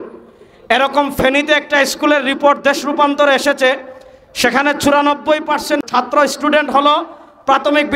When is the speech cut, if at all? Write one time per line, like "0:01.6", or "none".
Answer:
0:05.8